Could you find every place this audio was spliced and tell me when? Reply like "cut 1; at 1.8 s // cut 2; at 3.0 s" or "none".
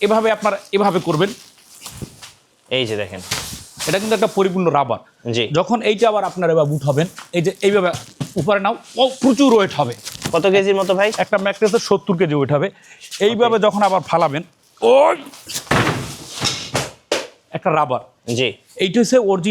none